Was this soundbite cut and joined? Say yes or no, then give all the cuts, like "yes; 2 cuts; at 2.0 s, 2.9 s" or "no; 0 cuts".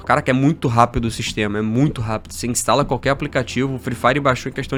no; 0 cuts